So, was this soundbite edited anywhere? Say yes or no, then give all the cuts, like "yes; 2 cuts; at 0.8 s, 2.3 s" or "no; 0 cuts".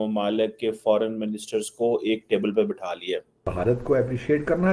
yes; 1 cut; at 3.5 s